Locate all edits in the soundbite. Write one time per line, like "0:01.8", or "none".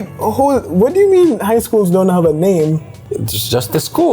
0:03.0

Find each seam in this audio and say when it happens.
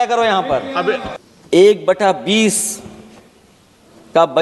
0:01.2

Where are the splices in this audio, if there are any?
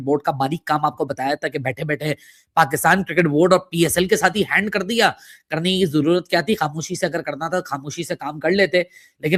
none

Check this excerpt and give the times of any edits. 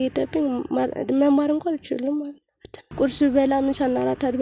0:02.8

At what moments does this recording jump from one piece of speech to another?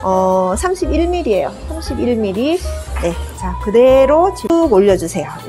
0:04.5

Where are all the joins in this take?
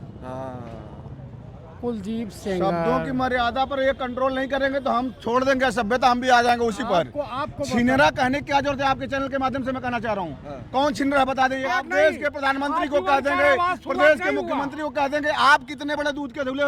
0:11.8

